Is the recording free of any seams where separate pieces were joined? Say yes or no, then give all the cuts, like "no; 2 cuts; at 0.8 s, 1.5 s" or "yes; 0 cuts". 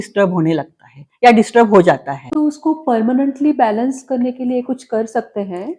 no; 1 cut; at 2.2 s